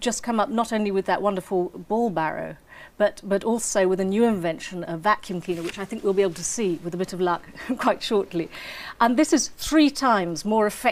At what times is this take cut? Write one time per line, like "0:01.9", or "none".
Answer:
none

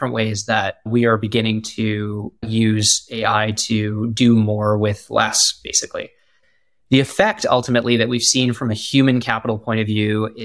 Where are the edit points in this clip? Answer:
0:06.4

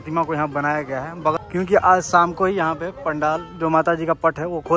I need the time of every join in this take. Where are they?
0:01.4

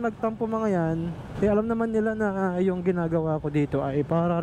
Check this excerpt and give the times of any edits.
none

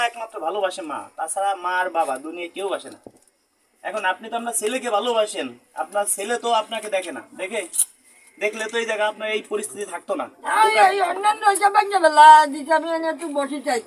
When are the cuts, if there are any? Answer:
none

